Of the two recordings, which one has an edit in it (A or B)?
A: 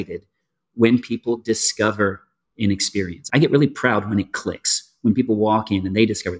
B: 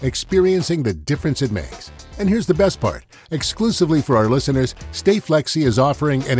A